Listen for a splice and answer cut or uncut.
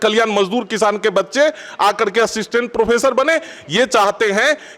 uncut